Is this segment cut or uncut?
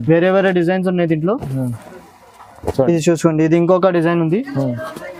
uncut